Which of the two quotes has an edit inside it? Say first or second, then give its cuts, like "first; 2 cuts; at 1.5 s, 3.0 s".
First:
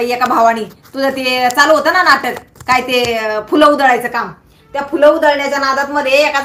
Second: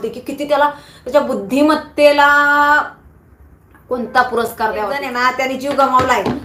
second; 1 cut; at 5.1 s